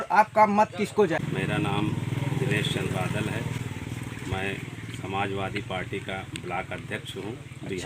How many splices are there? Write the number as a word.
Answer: one